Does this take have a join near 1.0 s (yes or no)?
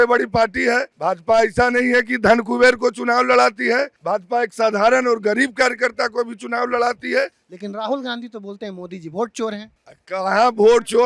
yes